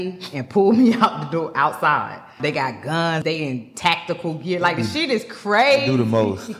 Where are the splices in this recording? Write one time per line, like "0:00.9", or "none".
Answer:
0:02.3
0:03.2